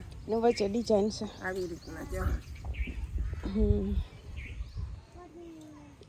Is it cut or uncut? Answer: uncut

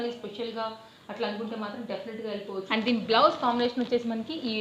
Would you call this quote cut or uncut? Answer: cut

